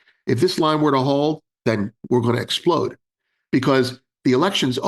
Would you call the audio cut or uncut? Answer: cut